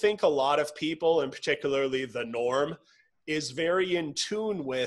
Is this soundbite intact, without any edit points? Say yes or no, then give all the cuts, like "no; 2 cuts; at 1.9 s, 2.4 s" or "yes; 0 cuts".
yes; 0 cuts